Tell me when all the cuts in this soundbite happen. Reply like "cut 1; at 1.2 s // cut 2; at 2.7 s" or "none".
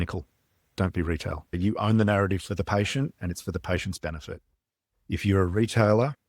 cut 1; at 1.4 s